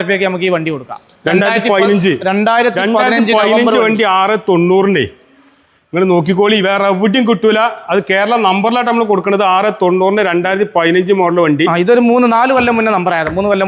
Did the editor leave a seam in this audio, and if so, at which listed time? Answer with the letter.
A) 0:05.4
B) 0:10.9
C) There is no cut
C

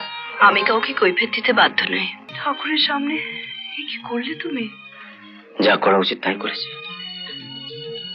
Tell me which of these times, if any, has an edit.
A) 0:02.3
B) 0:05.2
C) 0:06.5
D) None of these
A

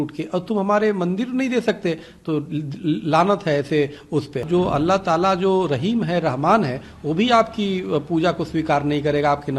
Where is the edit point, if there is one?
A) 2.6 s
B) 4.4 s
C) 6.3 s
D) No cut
B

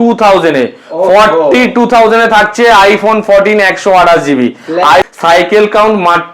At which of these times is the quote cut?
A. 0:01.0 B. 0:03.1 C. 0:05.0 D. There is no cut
C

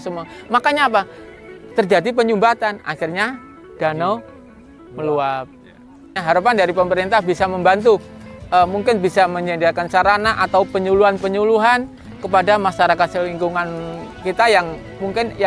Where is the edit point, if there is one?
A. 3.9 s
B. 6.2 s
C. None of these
B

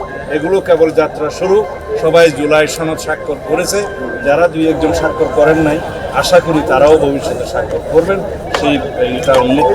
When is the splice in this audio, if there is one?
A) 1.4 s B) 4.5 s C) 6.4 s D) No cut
D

